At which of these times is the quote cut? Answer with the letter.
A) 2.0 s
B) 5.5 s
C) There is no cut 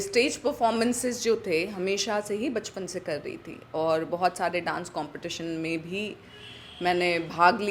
C